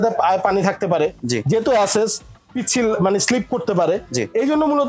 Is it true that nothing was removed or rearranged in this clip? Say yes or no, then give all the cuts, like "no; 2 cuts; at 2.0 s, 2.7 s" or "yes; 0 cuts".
yes; 0 cuts